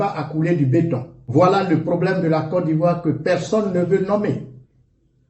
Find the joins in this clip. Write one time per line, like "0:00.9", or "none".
0:01.1